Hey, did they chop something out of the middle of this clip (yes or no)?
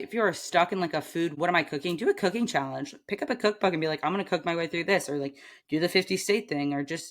yes